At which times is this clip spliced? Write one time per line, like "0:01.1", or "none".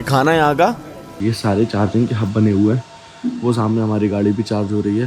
0:01.1